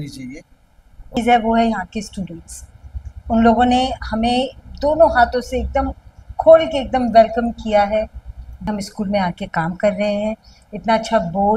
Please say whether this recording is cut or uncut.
cut